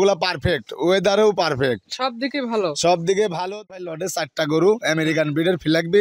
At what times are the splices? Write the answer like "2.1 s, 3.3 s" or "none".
3.9 s